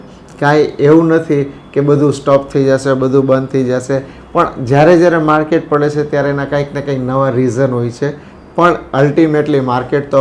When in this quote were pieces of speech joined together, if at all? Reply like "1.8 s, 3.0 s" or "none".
none